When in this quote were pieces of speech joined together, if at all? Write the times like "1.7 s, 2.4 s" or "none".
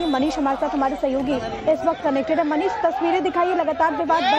none

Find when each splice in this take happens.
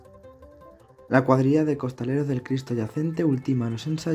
1.1 s

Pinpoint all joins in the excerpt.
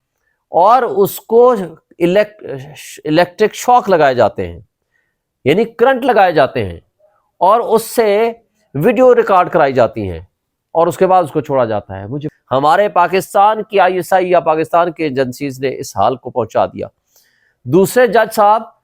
12.3 s

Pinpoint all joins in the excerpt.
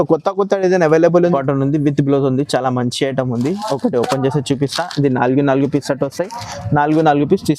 1.3 s

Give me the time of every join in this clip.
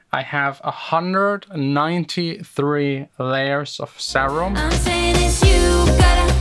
4.6 s

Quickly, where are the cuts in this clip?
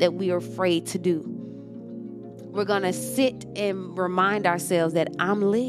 1.3 s, 2.5 s

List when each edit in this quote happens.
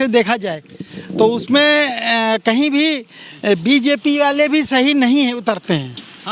none

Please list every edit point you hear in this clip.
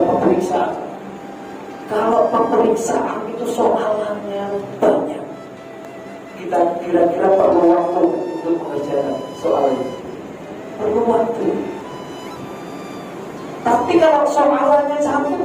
none

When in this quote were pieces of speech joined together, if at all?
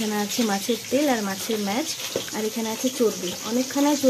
none

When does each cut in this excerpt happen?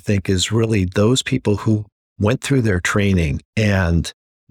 3.4 s

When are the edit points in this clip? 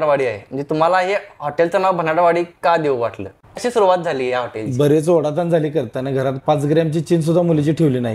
3.5 s

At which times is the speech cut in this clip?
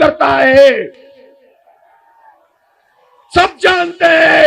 none

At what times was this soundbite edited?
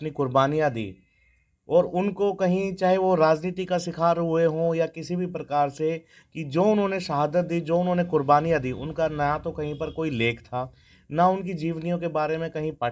none

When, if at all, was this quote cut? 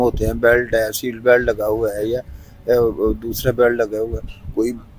none

